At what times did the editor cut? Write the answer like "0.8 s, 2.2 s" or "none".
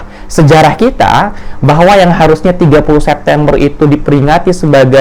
none